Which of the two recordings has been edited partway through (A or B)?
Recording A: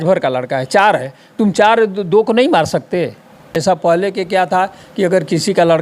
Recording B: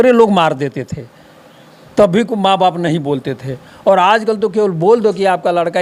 A